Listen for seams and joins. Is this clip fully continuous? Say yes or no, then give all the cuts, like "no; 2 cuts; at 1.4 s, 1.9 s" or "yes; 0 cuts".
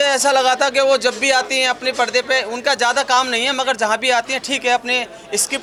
yes; 0 cuts